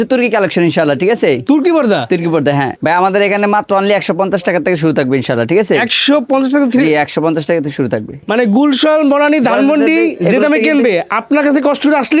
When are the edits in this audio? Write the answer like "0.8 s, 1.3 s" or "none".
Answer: 2.8 s, 8.2 s